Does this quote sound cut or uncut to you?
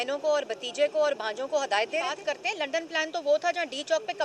cut